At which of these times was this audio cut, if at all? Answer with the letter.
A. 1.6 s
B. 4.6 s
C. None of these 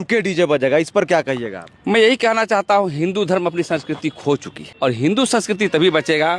B